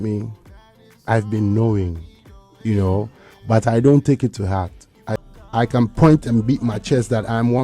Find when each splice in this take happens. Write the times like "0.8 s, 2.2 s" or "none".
5.2 s